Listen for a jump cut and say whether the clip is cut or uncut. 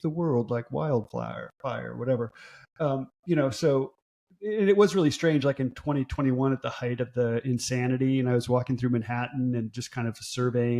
uncut